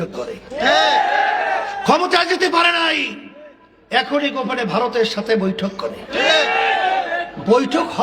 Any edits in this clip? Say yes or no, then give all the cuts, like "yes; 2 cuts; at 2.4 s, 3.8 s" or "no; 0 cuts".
no; 0 cuts